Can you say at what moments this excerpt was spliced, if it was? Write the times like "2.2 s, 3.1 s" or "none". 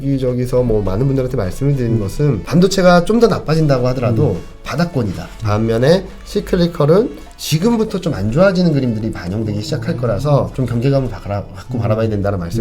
2.4 s, 5.3 s, 10.5 s